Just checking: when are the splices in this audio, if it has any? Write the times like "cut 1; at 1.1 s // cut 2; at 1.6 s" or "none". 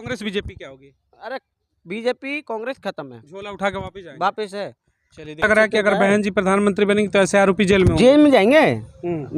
cut 1; at 5.4 s